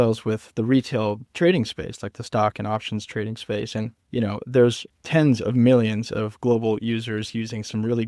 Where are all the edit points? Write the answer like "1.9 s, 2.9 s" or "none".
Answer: 4.9 s